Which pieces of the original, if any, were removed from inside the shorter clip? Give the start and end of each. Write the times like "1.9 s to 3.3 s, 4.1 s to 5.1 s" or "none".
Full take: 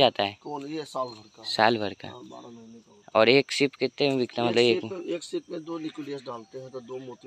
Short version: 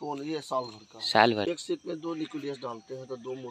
1.9 s to 5.1 s

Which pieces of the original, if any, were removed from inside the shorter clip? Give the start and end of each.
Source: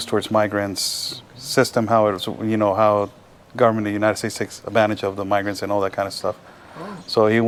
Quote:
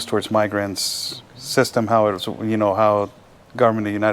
none

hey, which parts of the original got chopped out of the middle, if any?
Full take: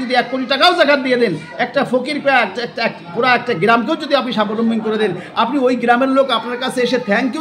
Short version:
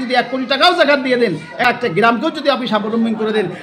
1.6 s to 3.3 s

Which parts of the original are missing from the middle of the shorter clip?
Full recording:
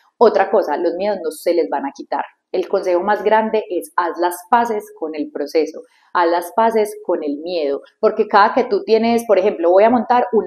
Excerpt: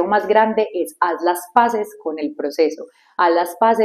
none

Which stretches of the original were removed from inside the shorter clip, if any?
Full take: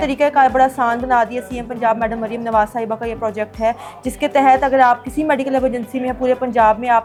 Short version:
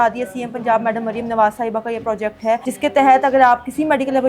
3.8 s to 4.1 s

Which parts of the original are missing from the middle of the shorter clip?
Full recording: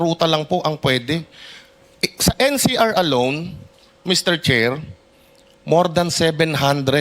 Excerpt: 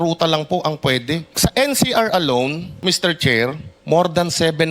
1.3 s to 2.1 s, 3.5 s to 3.9 s, 4.9 s to 5.5 s

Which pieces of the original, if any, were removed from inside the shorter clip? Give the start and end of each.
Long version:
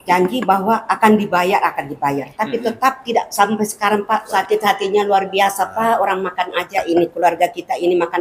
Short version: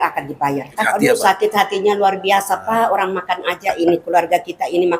2.7 s to 4.1 s

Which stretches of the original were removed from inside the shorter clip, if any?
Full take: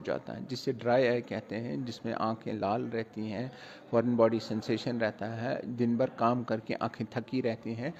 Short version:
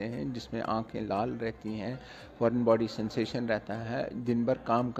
none

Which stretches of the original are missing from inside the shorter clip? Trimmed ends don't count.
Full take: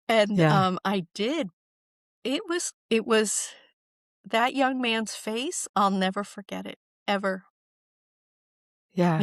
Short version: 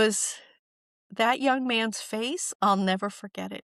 none

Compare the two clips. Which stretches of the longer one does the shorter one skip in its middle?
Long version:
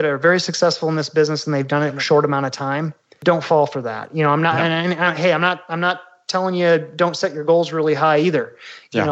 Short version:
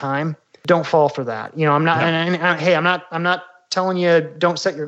none

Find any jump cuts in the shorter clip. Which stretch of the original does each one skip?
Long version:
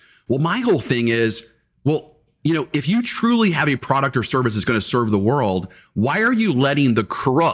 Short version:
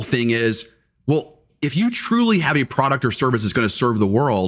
2.3 s to 2.7 s

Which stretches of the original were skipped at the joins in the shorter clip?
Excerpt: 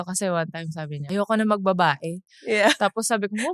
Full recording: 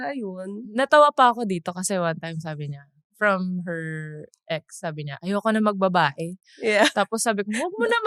2.7 s to 5.1 s

